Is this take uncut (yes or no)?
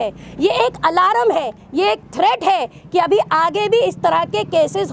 yes